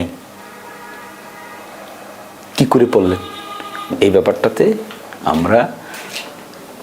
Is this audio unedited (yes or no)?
no